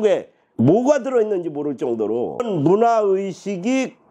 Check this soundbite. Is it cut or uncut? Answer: cut